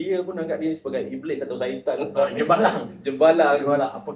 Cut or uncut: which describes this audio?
uncut